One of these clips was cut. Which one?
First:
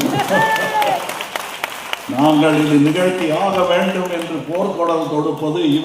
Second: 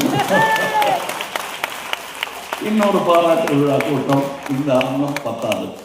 first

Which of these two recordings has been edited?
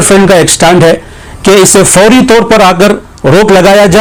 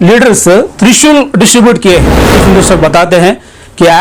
second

